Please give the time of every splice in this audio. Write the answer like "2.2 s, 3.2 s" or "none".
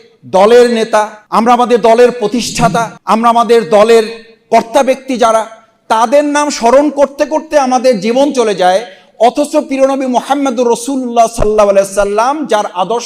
1.2 s, 2.9 s